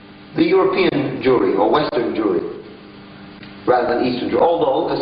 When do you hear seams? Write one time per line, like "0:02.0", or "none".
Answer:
none